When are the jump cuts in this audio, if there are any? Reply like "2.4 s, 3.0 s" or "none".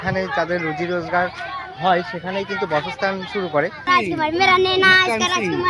3.9 s